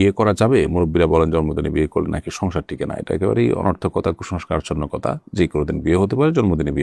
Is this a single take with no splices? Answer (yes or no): yes